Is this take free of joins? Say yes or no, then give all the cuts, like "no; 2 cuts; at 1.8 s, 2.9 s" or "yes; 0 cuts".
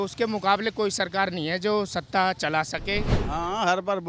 no; 1 cut; at 3.2 s